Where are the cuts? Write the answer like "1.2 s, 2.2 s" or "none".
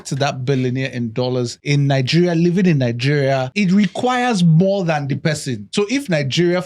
1.6 s, 3.5 s, 5.7 s